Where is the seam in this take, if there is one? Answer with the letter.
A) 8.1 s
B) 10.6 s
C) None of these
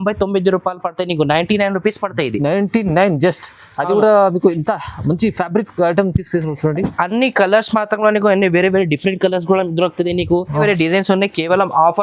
B